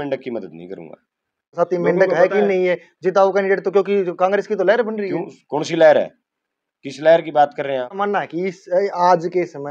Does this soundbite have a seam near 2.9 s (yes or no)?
no